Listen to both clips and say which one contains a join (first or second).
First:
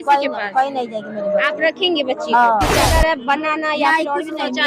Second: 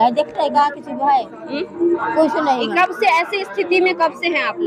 first